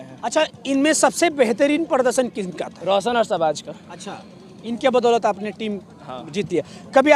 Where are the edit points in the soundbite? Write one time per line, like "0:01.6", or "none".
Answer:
none

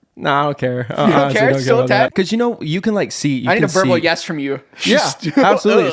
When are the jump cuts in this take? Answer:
0:02.1

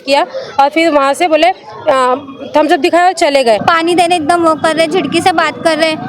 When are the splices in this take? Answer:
0:03.6

